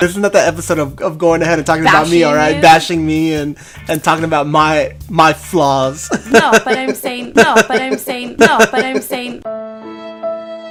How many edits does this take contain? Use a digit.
0